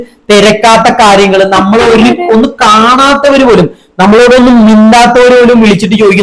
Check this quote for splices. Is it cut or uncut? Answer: uncut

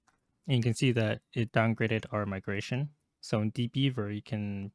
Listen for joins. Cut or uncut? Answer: uncut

